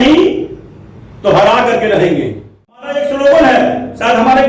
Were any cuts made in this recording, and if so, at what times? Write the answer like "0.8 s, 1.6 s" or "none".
2.9 s

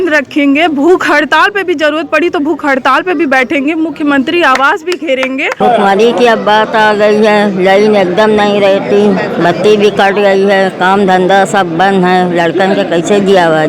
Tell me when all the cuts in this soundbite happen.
5.6 s

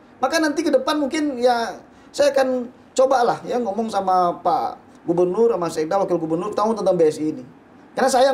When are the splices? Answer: none

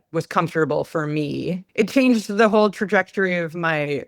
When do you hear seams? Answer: 1.7 s

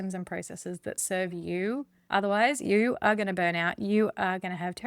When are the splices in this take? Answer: 1.9 s

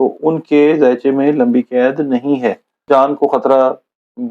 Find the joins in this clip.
2.7 s

